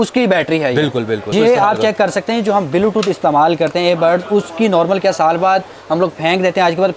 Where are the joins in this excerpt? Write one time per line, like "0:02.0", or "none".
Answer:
0:01.3